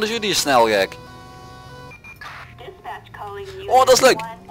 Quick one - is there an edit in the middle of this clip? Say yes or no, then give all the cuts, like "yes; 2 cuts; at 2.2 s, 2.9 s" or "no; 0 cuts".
yes; 1 cut; at 1.9 s